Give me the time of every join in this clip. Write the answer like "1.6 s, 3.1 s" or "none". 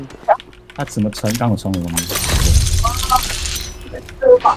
none